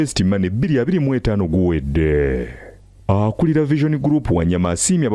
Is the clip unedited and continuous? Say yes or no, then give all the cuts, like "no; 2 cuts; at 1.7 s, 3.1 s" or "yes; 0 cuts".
yes; 0 cuts